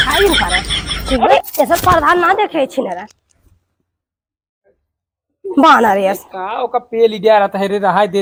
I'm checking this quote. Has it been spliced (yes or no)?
no